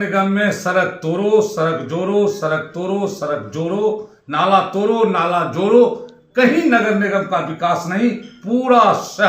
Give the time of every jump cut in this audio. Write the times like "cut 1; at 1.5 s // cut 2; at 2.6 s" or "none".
none